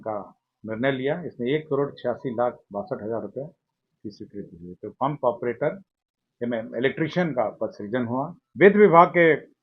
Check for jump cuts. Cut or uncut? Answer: cut